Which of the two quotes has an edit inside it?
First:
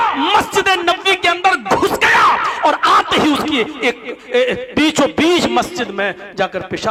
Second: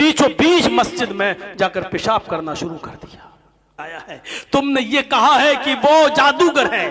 second; 1 cut; at 3.7 s

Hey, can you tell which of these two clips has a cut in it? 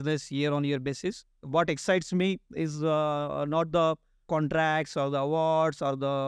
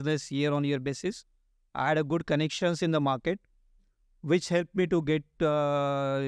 first; 2 cuts; at 1.4 s, 4.1 s

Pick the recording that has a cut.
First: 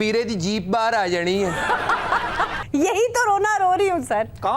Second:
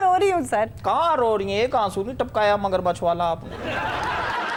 first; 1 cut; at 2.6 s

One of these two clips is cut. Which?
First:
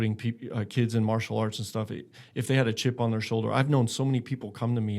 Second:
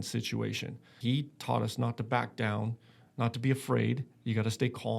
second; 1 cut; at 0.9 s

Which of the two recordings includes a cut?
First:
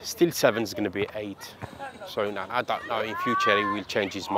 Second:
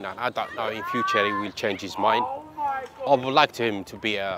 second; 1 cut; at 3.1 s

